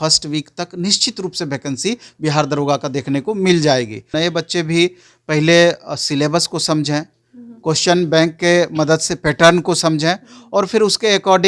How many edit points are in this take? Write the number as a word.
one